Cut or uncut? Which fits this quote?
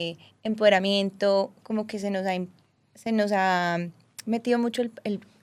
uncut